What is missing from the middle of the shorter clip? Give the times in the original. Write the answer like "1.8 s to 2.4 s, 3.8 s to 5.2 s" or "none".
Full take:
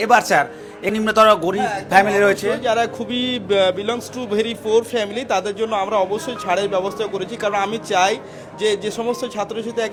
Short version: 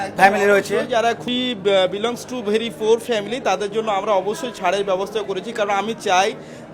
3.0 s to 3.1 s